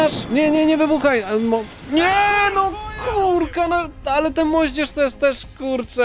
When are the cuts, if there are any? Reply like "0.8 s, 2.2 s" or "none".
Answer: none